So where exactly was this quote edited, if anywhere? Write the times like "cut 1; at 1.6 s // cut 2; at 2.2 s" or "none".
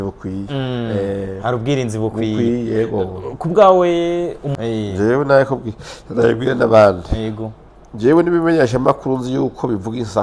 cut 1; at 4.5 s